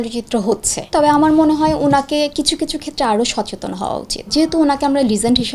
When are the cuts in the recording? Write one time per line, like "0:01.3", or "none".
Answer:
0:00.9
0:04.2